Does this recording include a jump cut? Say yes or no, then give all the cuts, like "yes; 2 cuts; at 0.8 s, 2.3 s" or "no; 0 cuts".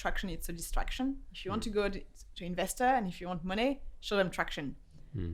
yes; 1 cut; at 1.3 s